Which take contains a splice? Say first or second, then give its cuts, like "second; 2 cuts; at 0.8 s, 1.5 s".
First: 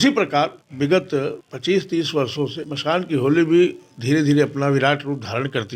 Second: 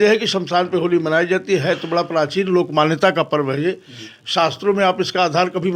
first; 2 cuts; at 1.0 s, 2.7 s